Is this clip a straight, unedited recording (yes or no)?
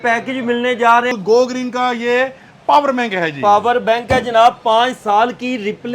no